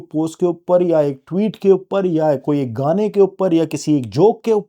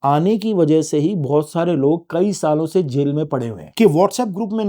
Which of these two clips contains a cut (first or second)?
second